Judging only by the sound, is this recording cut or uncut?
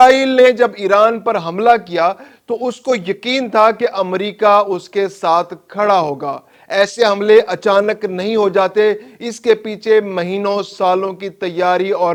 uncut